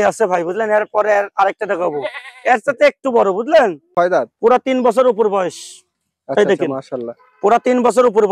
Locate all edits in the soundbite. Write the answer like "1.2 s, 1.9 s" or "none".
3.8 s